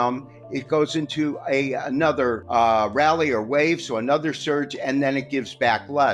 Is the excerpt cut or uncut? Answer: cut